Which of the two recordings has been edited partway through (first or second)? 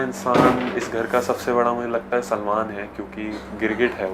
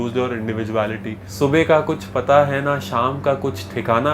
second